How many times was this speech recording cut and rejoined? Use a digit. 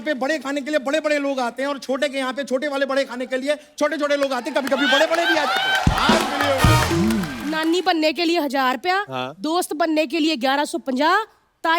1